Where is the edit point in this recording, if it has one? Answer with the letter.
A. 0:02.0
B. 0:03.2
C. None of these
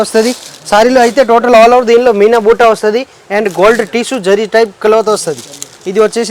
C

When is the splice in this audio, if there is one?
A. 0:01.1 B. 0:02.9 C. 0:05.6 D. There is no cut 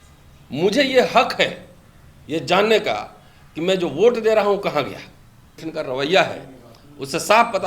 C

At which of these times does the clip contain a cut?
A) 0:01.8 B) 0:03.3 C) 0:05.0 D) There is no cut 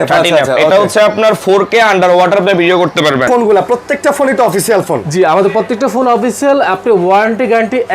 B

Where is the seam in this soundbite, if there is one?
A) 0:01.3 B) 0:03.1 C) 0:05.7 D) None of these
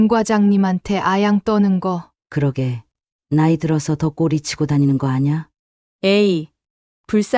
D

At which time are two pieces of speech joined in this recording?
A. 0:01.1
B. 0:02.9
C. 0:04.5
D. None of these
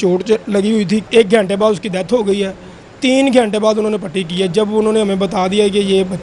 A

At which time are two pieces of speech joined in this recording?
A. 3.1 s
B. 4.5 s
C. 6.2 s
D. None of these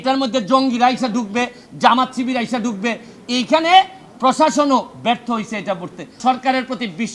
C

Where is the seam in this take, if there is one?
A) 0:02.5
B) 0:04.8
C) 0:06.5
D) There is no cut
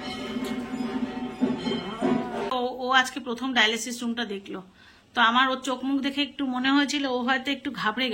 A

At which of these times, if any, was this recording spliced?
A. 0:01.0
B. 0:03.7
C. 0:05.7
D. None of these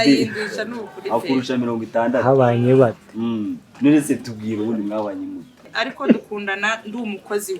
C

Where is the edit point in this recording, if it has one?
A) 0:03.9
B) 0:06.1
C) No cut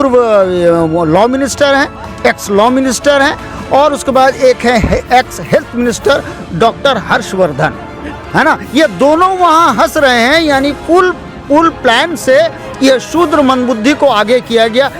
C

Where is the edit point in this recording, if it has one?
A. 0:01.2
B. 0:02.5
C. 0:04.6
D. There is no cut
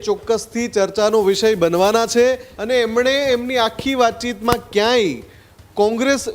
B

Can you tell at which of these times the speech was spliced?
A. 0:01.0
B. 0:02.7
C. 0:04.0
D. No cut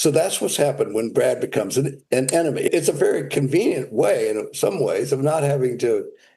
B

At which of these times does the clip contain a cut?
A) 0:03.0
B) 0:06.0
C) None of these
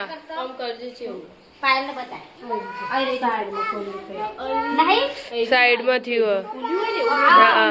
C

